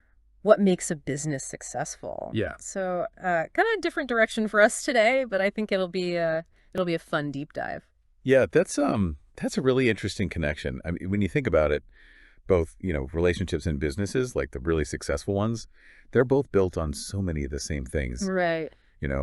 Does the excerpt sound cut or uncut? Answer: uncut